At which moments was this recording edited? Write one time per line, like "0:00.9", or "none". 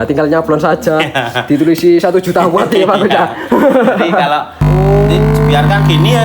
0:04.6